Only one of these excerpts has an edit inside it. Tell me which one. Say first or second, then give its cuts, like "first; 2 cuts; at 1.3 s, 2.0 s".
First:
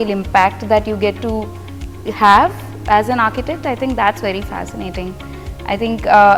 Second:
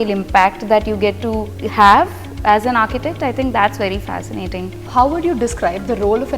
second; 2 cuts; at 1.6 s, 4.8 s